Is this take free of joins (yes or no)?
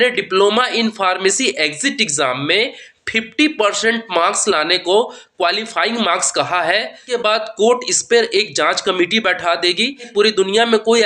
no